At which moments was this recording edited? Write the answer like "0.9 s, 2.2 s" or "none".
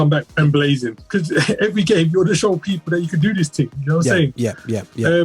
none